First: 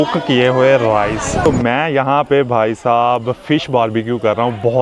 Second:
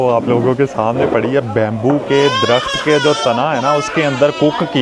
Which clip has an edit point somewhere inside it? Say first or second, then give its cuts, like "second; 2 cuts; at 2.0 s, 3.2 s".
first; 1 cut; at 1.5 s